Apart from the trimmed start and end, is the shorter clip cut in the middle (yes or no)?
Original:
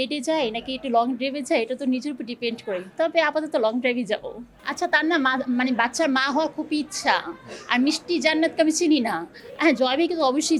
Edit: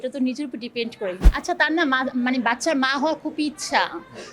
yes